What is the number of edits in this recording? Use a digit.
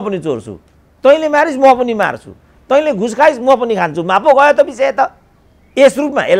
0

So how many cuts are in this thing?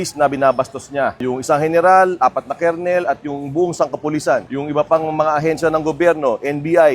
2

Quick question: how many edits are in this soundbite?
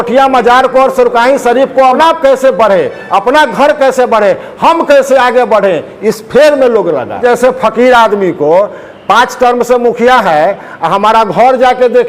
2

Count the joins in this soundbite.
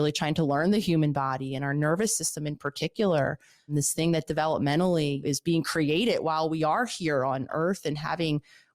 3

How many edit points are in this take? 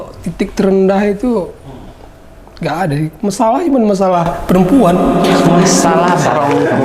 0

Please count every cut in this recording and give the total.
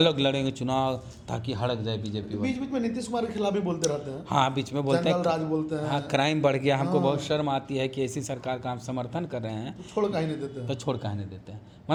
0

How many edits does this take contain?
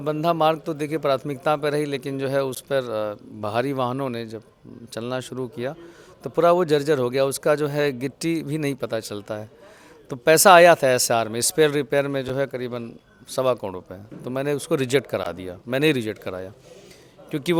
0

